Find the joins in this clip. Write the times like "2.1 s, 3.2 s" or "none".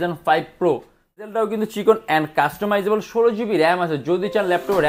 1.3 s